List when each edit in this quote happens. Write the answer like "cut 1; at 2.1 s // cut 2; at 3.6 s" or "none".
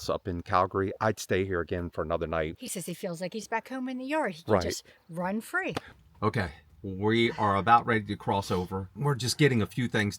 cut 1; at 2.5 s // cut 2; at 5.9 s